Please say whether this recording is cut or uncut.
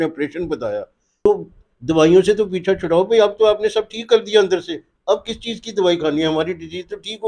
cut